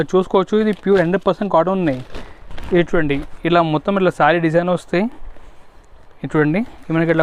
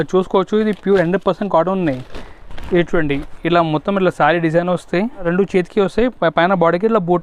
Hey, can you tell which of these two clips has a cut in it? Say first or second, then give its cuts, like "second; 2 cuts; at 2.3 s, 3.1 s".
second; 1 cut; at 5.2 s